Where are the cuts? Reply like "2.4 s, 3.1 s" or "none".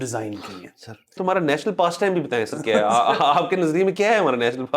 1.2 s